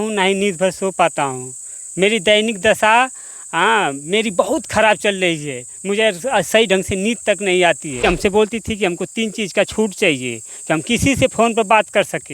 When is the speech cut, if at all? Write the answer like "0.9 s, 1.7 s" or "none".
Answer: 8.0 s